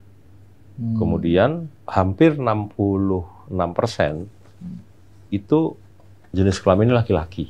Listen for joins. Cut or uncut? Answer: uncut